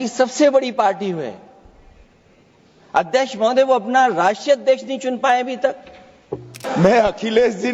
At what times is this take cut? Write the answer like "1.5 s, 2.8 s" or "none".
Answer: 6.6 s